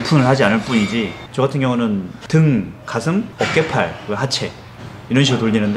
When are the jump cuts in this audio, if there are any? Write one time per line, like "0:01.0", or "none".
0:01.2